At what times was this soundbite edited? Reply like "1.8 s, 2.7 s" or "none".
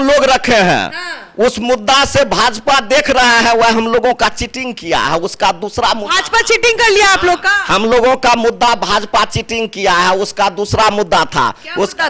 none